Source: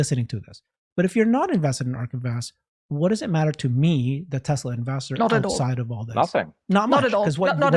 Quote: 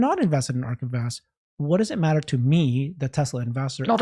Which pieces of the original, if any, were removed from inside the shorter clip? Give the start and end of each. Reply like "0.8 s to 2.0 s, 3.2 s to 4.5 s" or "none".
none